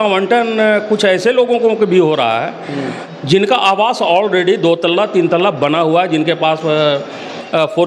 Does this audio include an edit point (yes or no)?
no